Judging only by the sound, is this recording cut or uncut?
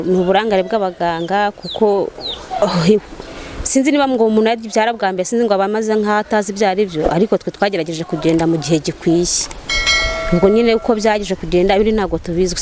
uncut